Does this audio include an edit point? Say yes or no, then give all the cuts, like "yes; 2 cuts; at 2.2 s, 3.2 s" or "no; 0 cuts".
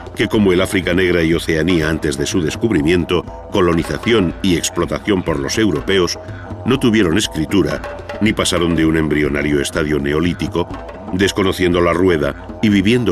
no; 0 cuts